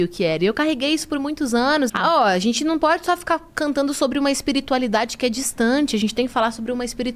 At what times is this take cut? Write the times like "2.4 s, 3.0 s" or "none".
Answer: 1.9 s